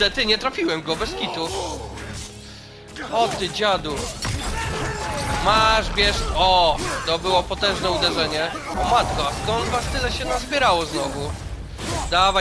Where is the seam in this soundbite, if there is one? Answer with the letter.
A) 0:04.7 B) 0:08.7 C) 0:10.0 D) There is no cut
B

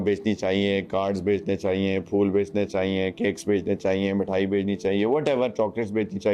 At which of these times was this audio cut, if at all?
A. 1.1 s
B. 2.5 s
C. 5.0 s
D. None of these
D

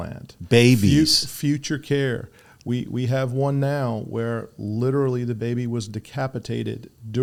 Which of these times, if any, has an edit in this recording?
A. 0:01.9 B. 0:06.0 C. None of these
C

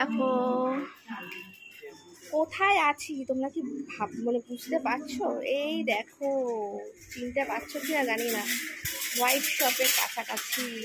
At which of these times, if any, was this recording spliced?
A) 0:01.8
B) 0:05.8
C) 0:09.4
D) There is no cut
A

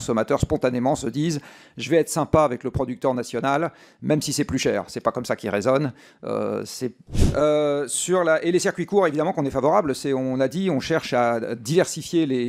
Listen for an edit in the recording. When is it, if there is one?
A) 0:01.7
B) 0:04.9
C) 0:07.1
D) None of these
C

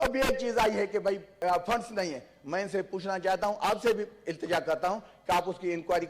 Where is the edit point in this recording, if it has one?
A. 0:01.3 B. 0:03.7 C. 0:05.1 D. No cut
A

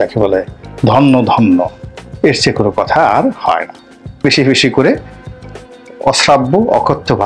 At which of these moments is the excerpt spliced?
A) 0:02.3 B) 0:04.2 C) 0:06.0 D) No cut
B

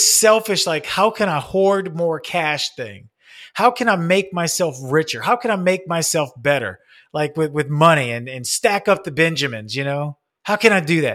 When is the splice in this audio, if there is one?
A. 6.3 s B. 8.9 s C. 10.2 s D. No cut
C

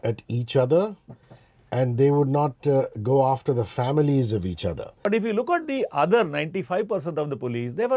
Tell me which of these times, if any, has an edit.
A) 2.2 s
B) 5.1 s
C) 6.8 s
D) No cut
B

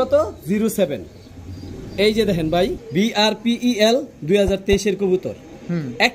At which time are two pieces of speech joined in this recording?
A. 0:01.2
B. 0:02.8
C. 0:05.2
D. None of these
B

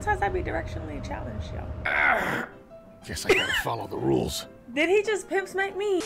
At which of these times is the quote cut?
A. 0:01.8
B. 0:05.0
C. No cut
A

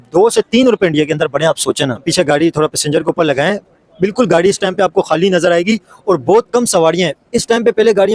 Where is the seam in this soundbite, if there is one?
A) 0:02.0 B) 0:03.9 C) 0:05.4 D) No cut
A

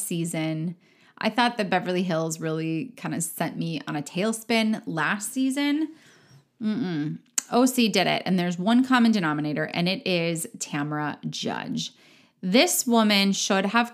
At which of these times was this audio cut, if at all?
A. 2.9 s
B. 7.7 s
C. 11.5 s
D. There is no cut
D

